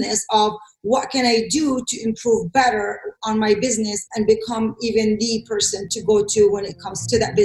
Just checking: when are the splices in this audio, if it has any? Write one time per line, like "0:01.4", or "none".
0:05.8